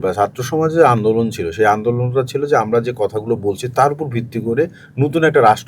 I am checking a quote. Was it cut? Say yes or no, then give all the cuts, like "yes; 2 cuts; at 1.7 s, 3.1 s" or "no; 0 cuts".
no; 0 cuts